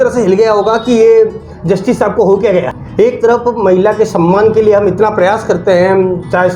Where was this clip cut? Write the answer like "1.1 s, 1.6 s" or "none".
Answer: 2.8 s